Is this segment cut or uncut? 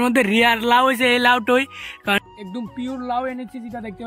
cut